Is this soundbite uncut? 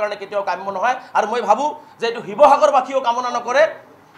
yes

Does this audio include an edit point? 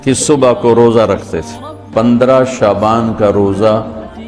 yes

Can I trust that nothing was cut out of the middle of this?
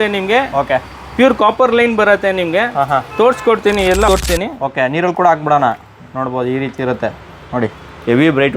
no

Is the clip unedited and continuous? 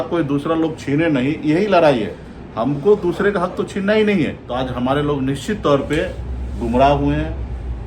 no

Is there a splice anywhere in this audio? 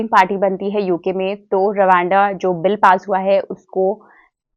no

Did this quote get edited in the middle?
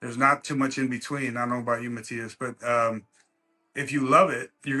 no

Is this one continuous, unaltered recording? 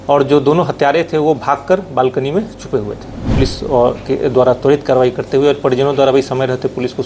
no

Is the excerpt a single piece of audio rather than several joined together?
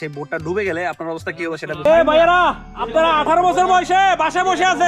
no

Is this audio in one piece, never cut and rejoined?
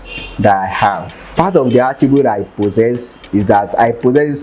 no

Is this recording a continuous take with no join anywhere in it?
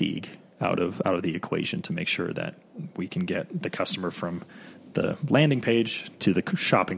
yes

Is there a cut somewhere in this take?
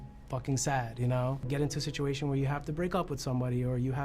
yes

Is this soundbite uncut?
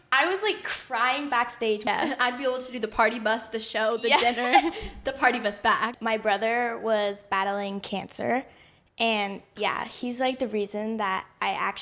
no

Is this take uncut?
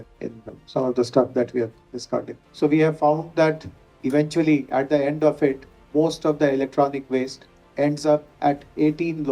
no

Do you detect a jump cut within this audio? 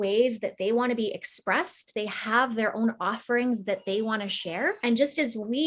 yes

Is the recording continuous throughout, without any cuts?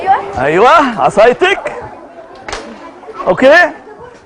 no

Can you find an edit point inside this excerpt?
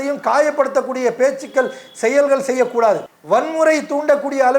yes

